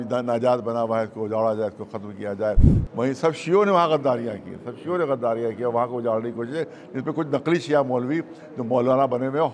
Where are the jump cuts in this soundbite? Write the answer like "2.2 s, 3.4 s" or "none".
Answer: 2.7 s